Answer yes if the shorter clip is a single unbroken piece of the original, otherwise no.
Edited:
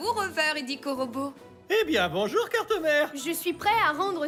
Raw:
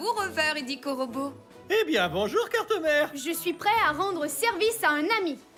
yes